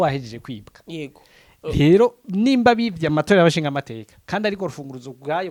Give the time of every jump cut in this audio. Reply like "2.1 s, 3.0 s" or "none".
none

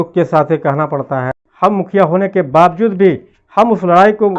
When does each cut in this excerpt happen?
1.4 s

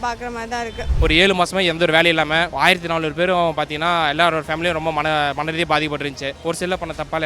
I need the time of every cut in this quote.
0.9 s, 2.5 s, 6.3 s

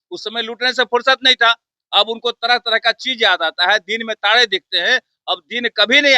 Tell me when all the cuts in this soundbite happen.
none

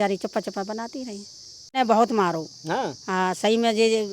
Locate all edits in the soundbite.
1.8 s

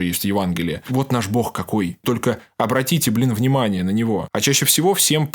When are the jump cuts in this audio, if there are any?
0.8 s, 2.0 s, 4.3 s

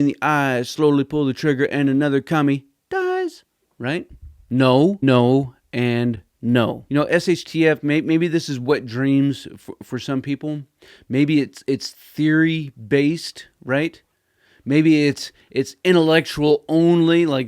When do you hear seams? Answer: 5.0 s, 6.8 s

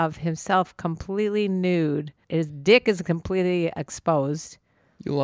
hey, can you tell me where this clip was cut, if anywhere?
2.2 s

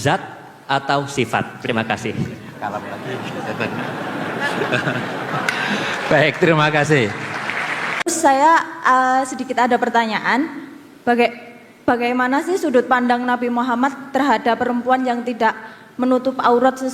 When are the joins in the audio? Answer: 7.9 s

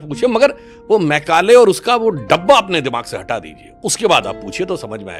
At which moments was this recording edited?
none

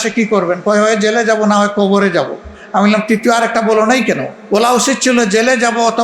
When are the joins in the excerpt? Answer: 4.3 s

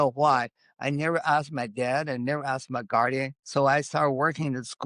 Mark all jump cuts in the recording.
3.4 s

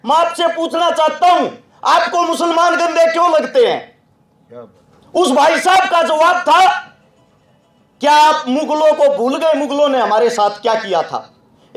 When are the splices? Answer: none

